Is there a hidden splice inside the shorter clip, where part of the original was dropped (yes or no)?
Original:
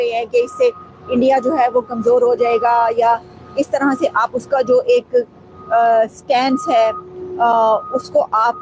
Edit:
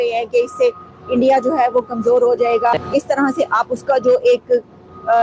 yes